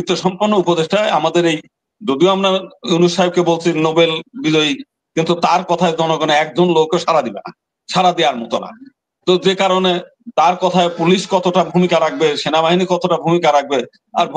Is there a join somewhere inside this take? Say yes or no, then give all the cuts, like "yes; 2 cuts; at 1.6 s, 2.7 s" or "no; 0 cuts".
no; 0 cuts